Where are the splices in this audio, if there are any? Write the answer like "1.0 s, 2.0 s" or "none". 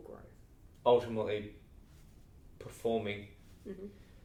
none